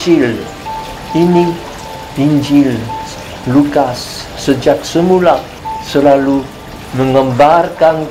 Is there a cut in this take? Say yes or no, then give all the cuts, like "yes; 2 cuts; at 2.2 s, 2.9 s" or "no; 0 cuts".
yes; 1 cut; at 5.6 s